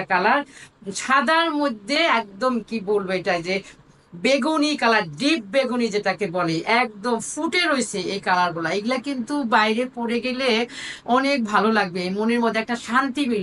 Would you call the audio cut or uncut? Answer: uncut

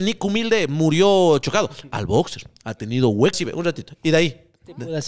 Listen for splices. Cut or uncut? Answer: cut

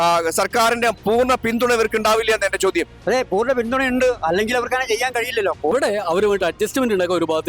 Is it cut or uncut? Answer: cut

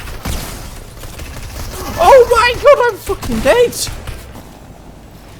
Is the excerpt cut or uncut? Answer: cut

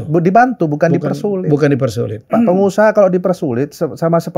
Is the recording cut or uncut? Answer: cut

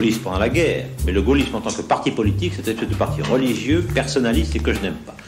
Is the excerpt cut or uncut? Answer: cut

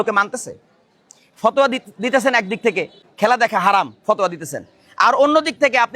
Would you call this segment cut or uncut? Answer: cut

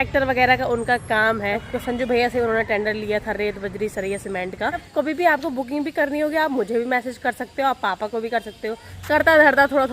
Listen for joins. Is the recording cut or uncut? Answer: cut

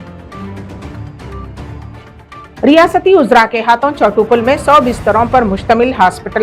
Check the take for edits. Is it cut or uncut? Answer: cut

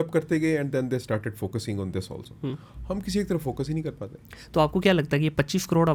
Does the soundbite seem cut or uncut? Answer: uncut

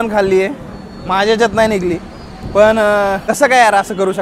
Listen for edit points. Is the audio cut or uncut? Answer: cut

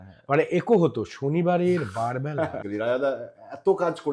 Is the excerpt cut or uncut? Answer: cut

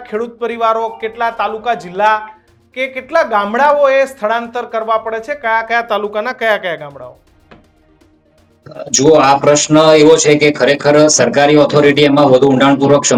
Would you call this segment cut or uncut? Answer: uncut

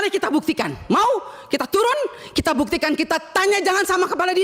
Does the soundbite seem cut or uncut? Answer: uncut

